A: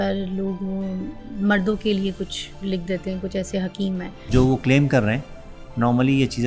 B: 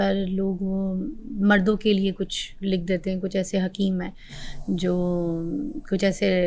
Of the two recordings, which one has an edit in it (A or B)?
A